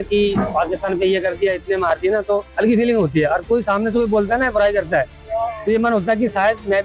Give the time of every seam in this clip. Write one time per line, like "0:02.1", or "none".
none